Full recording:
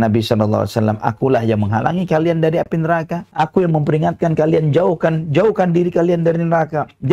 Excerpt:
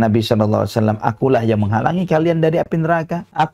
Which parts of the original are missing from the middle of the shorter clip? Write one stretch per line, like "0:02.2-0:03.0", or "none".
none